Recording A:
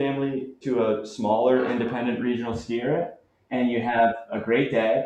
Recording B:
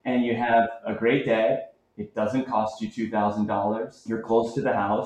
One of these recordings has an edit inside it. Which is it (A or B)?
B